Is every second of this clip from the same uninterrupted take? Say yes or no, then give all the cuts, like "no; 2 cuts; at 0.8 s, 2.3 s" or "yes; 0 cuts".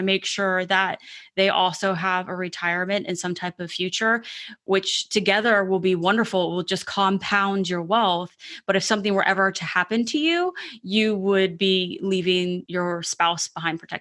no; 1 cut; at 12.6 s